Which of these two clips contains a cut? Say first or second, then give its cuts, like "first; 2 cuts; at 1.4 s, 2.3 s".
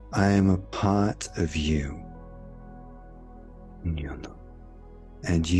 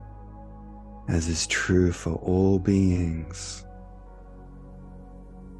second; 1 cut; at 0.9 s